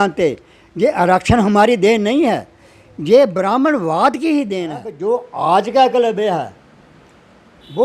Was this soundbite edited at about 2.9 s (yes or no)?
no